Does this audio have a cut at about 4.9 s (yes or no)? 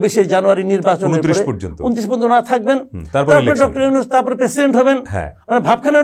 no